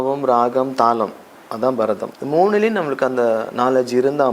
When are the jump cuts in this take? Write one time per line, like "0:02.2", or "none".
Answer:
0:02.1

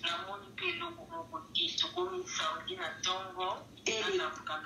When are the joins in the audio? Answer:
none

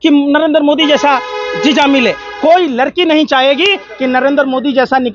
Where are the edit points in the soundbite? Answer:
none

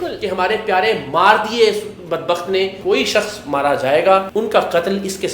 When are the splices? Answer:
0:02.8
0:04.3

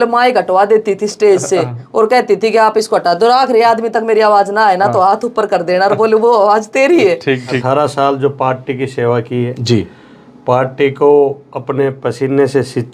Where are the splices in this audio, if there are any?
0:07.6

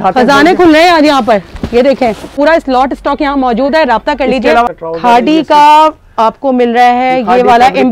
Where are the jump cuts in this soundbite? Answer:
0:02.3
0:04.8

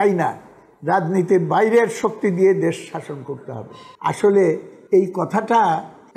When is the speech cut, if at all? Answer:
none

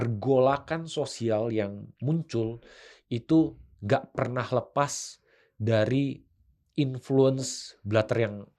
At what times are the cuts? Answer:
none

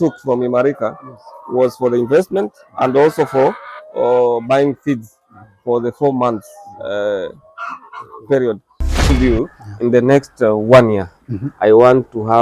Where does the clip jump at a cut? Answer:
0:09.1

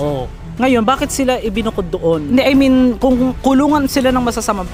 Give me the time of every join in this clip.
none

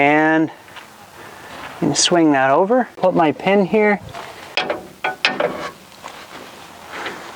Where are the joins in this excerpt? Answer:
0:03.0
0:04.3

